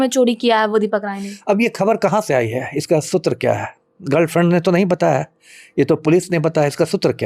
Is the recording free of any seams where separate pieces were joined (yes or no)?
yes